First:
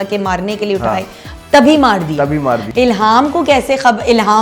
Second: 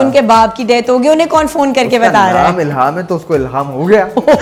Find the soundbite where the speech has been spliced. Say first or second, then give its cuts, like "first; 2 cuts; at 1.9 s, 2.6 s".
first; 1 cut; at 2.7 s